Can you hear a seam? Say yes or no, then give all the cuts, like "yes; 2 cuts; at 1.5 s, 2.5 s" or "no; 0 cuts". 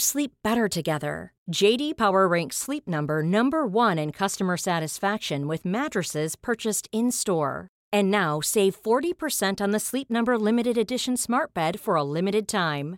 no; 0 cuts